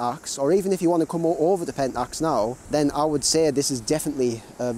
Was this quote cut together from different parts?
yes; 1 cut; at 2.6 s

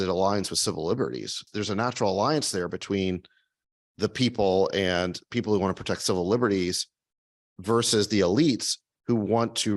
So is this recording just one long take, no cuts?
no; 1 cut; at 1.5 s

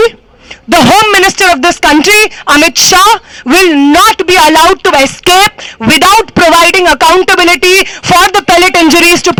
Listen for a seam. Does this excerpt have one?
no; 0 cuts

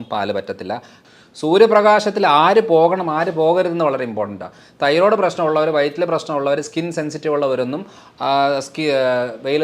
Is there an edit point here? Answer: yes; 1 cut; at 1.0 s

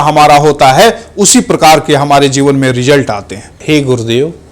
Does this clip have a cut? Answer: yes; 1 cut; at 3.6 s

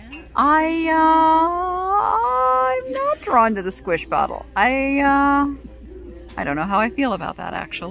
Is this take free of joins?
yes; 0 cuts

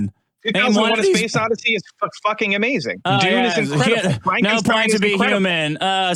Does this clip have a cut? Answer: no; 0 cuts

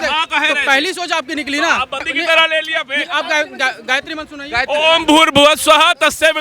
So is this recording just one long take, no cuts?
no; 1 cut; at 2.1 s

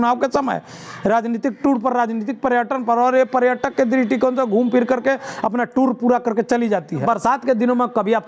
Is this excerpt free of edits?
no; 1 cut; at 7.0 s

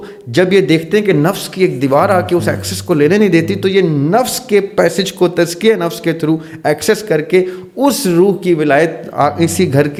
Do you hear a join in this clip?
no; 0 cuts

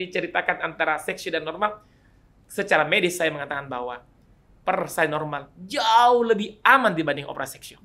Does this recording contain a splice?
no; 0 cuts

